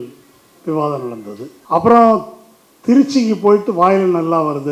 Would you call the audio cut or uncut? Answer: cut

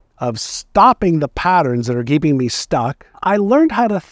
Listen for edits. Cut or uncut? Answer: cut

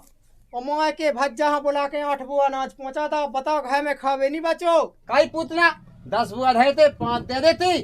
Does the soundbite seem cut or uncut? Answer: cut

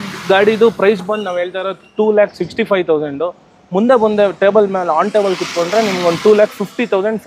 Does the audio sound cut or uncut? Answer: uncut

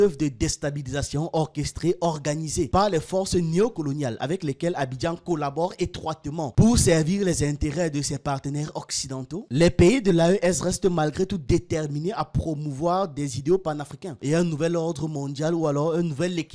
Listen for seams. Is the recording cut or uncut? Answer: uncut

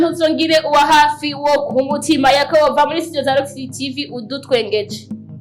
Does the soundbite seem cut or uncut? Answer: uncut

